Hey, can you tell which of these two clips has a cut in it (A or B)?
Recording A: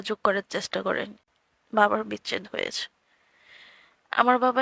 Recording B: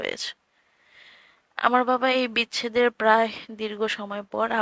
A